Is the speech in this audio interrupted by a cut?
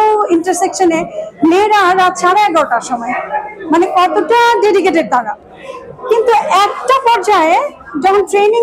no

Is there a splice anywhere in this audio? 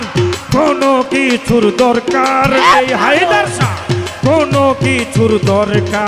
no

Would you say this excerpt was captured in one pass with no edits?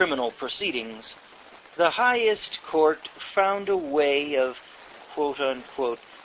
no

